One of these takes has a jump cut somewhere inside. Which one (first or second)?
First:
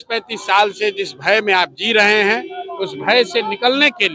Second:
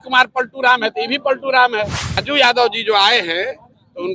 second